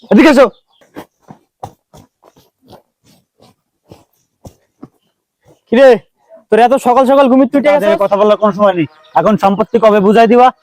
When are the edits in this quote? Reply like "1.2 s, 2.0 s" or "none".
7.8 s